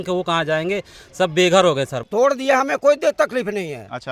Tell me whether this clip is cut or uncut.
cut